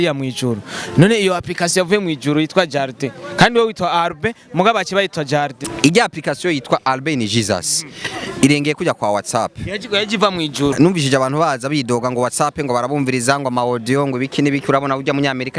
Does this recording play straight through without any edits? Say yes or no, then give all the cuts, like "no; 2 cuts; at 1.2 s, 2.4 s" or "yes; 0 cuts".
no; 2 cuts; at 5.6 s, 10.7 s